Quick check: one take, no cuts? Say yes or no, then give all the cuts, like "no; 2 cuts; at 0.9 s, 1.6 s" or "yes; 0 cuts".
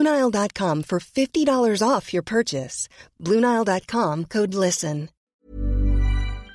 no; 1 cut; at 5.2 s